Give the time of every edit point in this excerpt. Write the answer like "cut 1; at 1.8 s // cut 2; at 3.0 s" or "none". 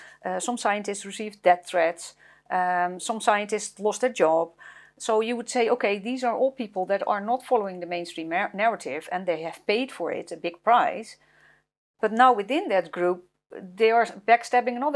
none